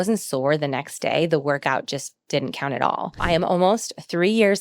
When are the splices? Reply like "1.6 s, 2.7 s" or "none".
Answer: 3.2 s